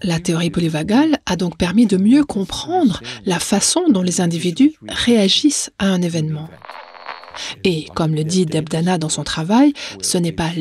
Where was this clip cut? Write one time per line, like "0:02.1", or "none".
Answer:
0:07.0